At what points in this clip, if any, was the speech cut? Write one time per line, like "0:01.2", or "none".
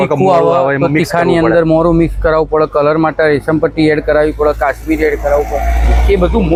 none

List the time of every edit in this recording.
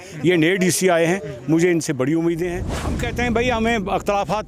0:02.7

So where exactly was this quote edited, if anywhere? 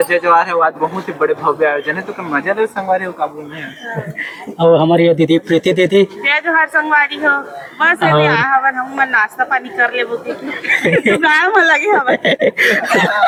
none

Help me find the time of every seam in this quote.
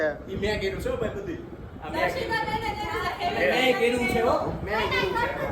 none

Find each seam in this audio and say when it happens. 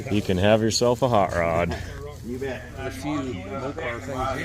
0:02.7

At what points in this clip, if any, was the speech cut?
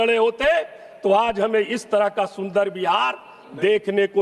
none

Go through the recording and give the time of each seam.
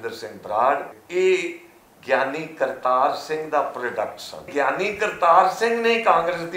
0:01.0
0:04.5

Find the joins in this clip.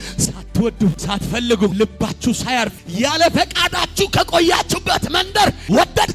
0:01.0
0:02.8

